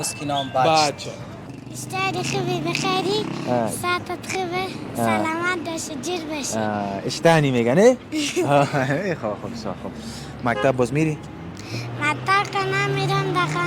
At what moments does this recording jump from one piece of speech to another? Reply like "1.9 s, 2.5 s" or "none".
1.5 s